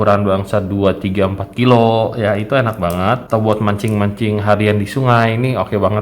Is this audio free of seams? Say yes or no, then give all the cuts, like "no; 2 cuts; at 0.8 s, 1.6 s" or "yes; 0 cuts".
no; 1 cut; at 3.2 s